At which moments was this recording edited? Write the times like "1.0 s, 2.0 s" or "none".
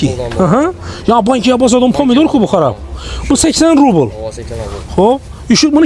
none